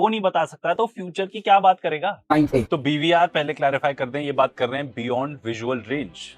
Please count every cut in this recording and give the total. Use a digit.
1